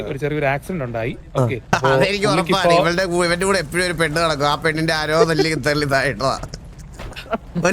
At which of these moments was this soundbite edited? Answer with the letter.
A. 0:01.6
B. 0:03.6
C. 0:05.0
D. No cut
A